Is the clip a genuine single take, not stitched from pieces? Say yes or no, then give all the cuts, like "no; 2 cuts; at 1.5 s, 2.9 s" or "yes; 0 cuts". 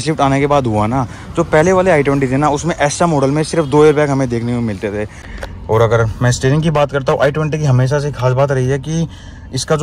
no; 1 cut; at 5.2 s